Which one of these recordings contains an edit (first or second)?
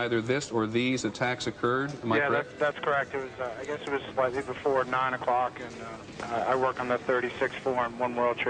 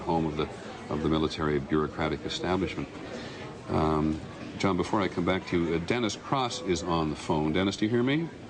first